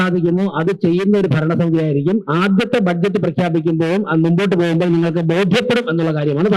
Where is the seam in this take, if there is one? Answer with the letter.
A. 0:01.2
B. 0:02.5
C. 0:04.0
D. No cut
D